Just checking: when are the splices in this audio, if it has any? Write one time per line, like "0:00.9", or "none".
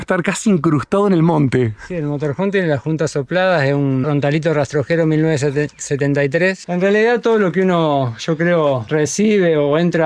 0:06.6